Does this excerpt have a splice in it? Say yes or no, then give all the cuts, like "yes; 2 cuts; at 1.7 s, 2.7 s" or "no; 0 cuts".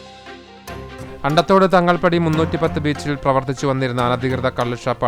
yes; 1 cut; at 1.1 s